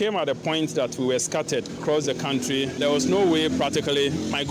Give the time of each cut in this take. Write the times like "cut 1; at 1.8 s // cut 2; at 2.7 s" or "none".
cut 1; at 1.8 s // cut 2; at 2.8 s